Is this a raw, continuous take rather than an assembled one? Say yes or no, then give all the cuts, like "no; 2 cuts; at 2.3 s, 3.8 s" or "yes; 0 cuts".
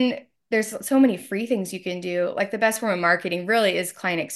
yes; 0 cuts